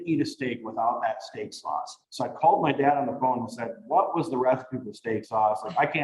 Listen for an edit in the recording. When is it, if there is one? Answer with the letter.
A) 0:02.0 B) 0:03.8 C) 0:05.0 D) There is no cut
A